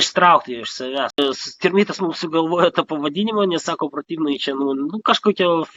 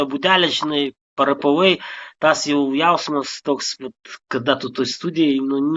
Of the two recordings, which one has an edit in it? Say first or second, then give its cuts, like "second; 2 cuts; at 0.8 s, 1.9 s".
first; 1 cut; at 1.2 s